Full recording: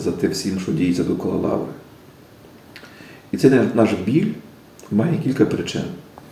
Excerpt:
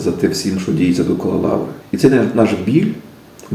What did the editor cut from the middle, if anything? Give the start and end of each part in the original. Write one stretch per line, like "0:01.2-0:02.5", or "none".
0:01.8-0:03.2